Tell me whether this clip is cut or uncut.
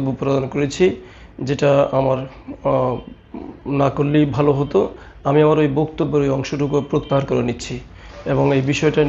uncut